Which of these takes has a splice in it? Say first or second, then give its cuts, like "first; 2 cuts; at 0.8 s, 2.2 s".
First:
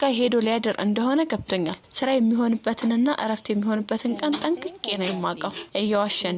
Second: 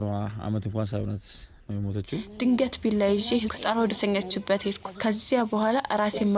second; 1 cut; at 2.2 s